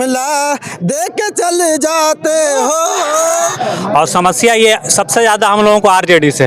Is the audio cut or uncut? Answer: cut